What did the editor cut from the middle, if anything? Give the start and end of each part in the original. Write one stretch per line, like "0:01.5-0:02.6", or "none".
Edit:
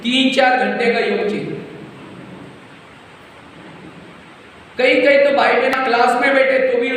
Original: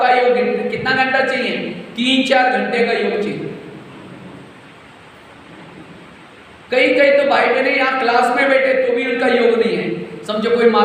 0:07.7-0:07.9